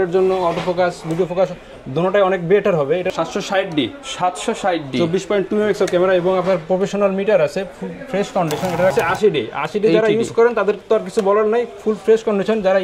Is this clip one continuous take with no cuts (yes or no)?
no